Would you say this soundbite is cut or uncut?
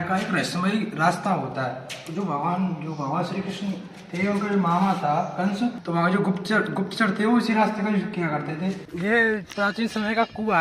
cut